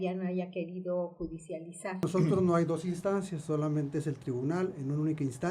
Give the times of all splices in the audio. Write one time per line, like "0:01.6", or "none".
0:02.0